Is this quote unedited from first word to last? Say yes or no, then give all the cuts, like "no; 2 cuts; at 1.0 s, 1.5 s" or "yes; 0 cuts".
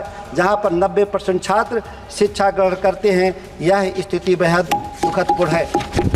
yes; 0 cuts